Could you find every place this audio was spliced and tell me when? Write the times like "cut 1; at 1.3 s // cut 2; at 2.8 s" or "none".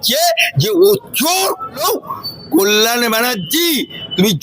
cut 1; at 1.8 s